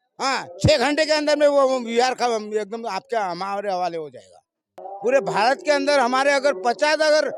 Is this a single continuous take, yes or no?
no